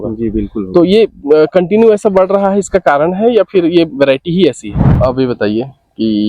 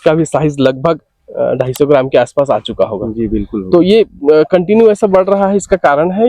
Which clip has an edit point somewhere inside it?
first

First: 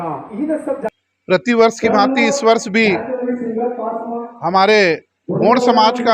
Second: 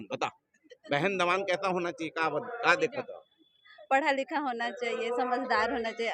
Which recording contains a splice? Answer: first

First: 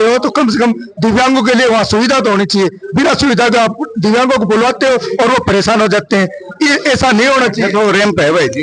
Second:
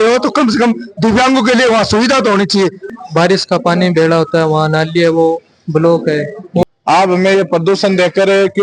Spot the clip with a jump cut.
second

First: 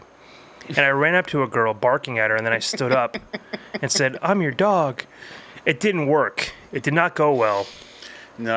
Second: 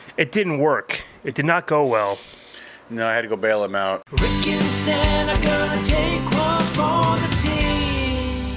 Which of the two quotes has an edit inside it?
second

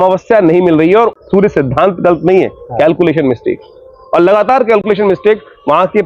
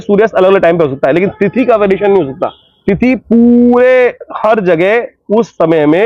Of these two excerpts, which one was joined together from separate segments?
first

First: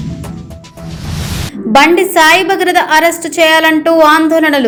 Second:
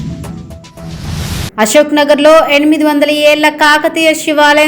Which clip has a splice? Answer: second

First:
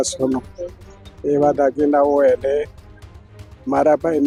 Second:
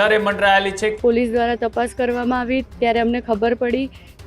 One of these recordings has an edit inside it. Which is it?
second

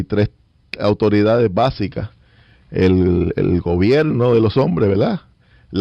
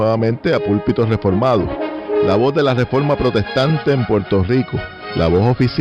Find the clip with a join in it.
first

